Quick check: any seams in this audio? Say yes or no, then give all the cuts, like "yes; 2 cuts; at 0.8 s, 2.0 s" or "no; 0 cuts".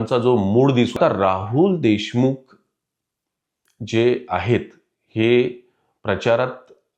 yes; 1 cut; at 1.0 s